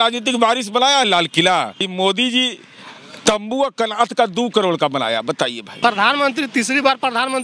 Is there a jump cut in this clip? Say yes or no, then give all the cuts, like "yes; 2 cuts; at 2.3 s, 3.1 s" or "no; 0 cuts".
yes; 2 cuts; at 1.9 s, 5.6 s